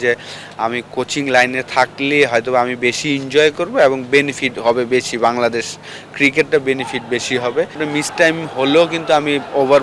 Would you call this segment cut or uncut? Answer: cut